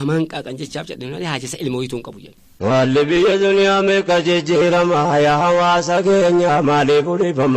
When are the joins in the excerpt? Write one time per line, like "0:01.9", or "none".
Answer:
0:02.7